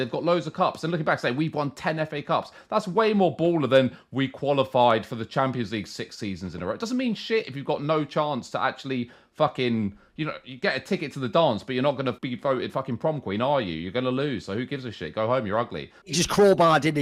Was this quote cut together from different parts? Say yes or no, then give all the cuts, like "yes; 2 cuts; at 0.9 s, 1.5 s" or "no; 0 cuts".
yes; 2 cuts; at 12.3 s, 16.1 s